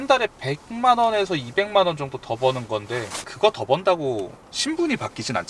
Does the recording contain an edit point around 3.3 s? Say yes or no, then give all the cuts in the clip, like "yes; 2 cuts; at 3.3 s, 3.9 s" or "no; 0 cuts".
yes; 1 cut; at 3.3 s